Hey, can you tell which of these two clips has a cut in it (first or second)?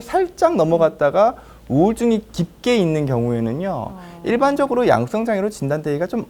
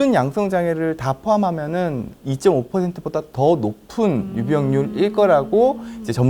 second